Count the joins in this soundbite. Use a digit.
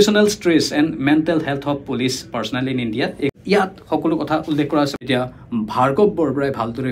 2